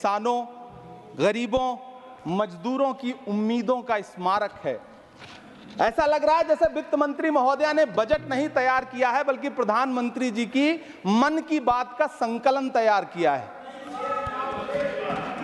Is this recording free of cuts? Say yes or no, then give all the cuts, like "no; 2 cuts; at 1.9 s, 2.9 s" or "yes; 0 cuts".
yes; 0 cuts